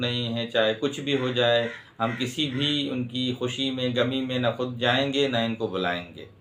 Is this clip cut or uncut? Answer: uncut